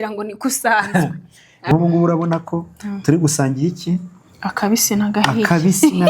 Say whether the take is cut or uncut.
cut